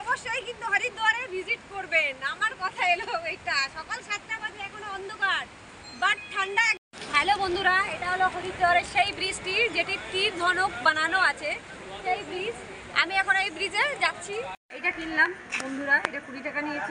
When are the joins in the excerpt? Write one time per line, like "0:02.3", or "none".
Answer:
0:06.9
0:14.6